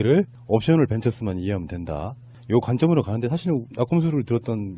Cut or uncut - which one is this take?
uncut